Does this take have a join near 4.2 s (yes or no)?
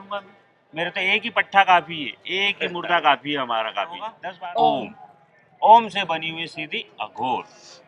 yes